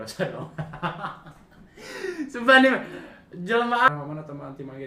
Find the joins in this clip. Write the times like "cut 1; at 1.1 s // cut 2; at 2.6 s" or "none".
cut 1; at 3.9 s

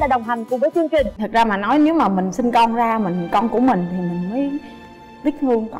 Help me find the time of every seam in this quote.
cut 1; at 1.2 s

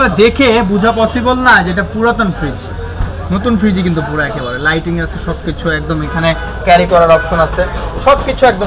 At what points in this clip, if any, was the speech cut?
none

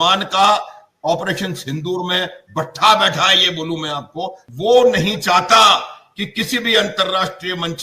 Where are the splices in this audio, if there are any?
cut 1; at 4.4 s

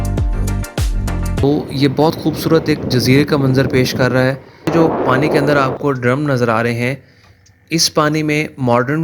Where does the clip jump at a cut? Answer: cut 1; at 1.4 s // cut 2; at 4.7 s

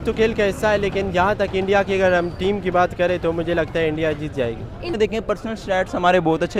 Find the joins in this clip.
cut 1; at 4.9 s

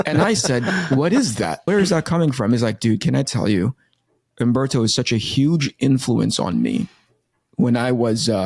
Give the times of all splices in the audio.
cut 1; at 1.6 s

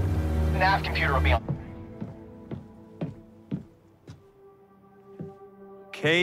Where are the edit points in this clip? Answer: cut 1; at 1.4 s

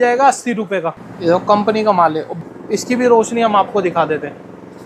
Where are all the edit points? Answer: cut 1; at 1.0 s // cut 2; at 2.4 s

